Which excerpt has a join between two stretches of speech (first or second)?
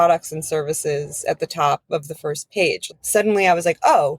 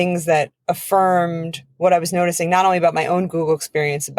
first